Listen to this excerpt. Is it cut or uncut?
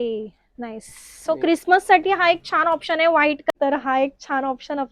cut